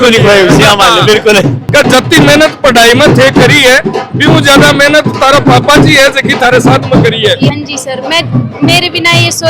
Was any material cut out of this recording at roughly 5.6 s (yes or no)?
no